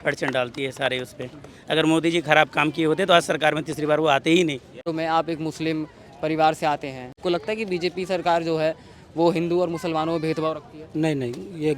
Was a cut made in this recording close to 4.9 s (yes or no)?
yes